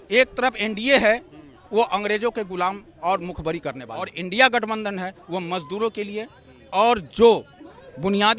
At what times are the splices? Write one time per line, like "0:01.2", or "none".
0:04.1